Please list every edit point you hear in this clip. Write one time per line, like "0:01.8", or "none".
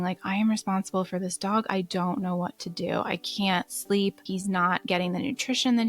0:04.3